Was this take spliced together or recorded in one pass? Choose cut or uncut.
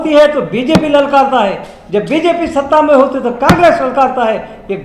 uncut